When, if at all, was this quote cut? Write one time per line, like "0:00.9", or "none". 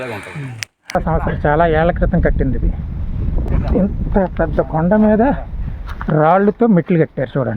0:00.9
0:03.4